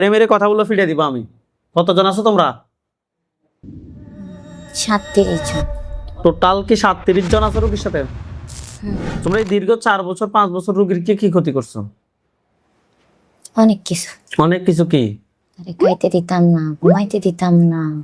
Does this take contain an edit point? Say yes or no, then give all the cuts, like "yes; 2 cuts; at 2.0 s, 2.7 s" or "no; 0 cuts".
yes; 1 cut; at 9.1 s